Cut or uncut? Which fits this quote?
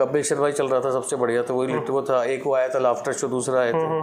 uncut